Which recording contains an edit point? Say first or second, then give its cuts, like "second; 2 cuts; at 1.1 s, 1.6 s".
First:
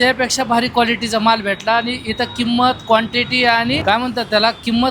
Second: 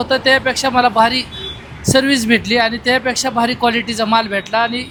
first; 1 cut; at 3.8 s